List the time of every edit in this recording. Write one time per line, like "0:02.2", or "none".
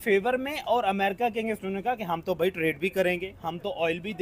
none